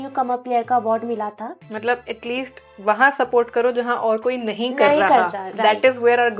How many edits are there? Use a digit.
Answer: 1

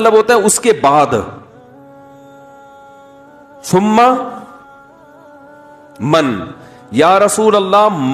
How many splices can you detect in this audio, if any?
2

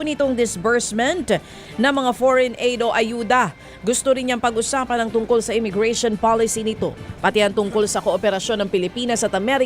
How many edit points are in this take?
1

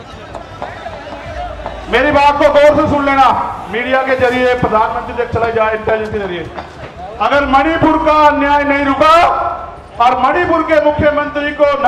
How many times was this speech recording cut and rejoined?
0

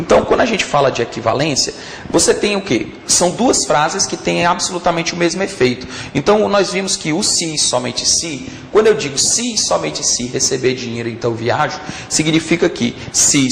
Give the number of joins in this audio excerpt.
0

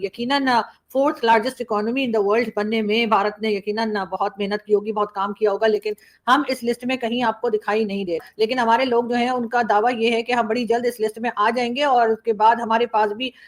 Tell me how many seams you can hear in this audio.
1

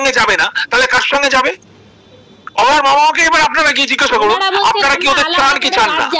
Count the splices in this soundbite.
0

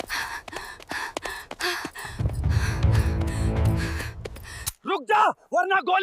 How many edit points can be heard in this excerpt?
1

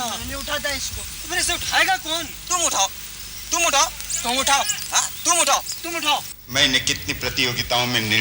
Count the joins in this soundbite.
1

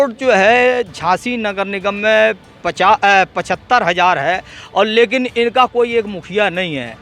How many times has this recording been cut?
0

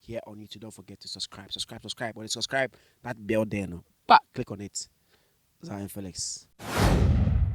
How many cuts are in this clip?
1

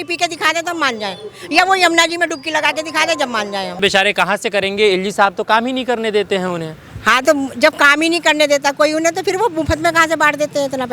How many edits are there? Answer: 1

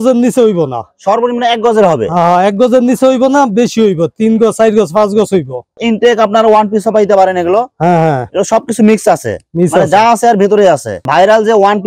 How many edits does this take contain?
2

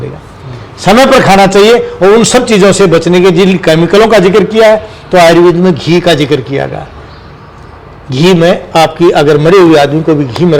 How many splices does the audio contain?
0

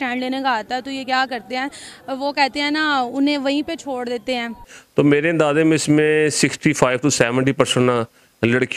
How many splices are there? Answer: 1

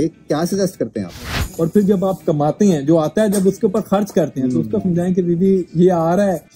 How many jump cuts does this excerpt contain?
1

